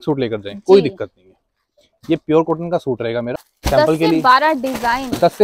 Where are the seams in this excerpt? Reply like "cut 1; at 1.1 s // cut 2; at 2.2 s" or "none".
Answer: cut 1; at 3.4 s